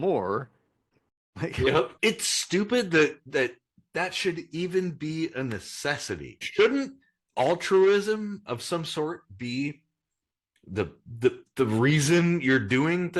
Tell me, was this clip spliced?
yes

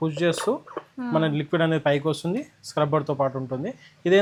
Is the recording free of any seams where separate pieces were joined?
yes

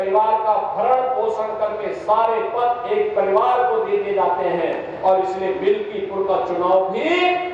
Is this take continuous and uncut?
yes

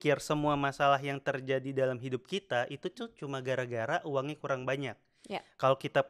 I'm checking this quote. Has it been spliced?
no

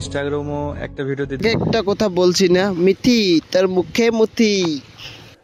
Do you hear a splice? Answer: yes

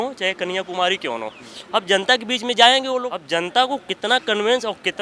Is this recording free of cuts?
no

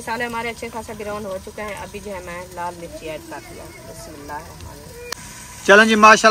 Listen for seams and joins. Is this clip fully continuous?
no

